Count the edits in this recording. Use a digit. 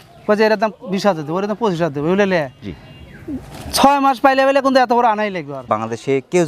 1